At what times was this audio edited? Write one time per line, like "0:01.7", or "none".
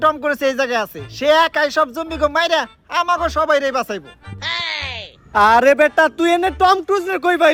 none